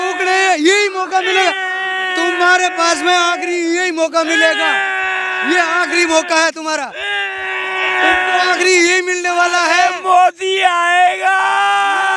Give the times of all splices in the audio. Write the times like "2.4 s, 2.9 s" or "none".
none

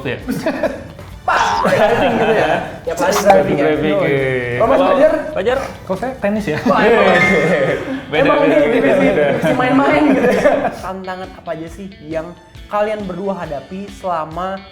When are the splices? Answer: 10.9 s

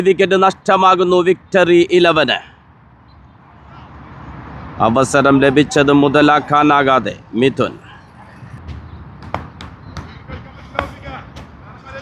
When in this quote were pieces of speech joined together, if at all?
8.6 s

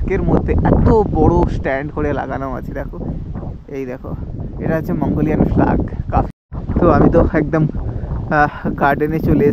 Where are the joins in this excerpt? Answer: 6.3 s

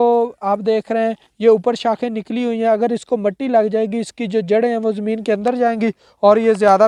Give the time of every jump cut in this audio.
none

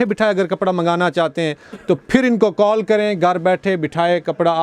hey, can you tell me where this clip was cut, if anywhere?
none

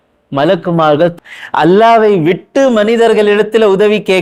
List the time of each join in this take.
1.1 s

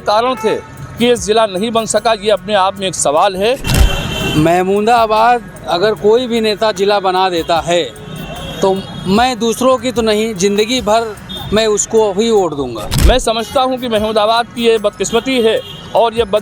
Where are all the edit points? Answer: 3.7 s, 12.9 s

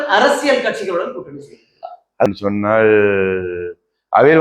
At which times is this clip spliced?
2.3 s

